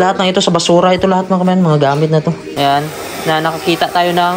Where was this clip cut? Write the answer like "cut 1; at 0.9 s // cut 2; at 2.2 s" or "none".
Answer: cut 1; at 2.5 s